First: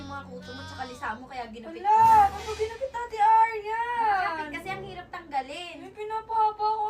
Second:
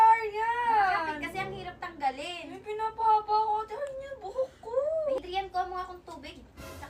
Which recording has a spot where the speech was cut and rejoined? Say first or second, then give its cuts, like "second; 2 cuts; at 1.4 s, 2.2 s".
second; 1 cut; at 5.2 s